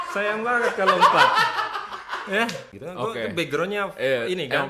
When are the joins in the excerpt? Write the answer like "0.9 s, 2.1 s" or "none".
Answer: 2.7 s